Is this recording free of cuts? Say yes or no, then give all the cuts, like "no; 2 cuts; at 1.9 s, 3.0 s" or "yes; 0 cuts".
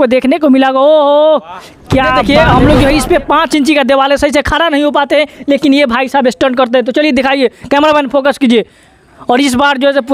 no; 1 cut; at 2.2 s